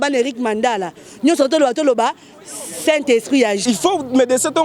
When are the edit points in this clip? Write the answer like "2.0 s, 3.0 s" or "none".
3.6 s